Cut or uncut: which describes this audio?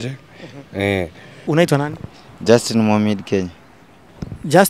cut